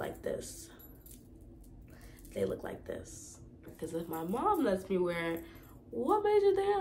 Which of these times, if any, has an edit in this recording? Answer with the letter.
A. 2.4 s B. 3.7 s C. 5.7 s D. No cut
B